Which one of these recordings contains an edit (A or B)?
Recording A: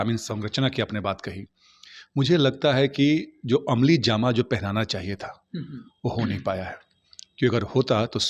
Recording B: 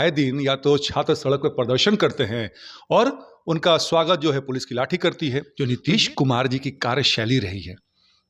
B